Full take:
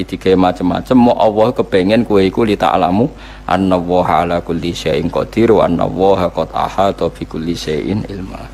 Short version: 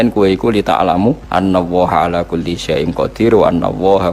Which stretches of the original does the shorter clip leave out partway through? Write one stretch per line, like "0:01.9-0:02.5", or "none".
0:03.2-0:03.4